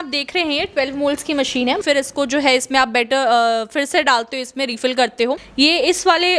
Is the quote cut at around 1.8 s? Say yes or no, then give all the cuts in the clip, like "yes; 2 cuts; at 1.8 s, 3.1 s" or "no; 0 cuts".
yes; 2 cuts; at 1.8 s, 5.5 s